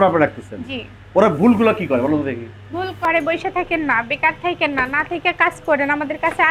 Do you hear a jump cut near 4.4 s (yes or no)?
no